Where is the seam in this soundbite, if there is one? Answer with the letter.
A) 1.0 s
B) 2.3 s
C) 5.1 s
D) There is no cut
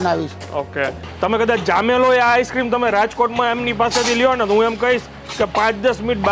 A